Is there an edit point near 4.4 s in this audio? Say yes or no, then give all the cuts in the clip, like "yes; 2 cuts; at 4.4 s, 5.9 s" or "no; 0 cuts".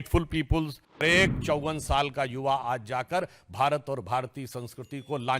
no; 1 cut; at 1.0 s